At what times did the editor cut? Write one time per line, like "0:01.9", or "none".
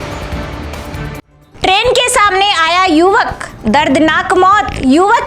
none